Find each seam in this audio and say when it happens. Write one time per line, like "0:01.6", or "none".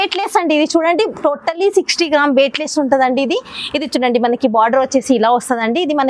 none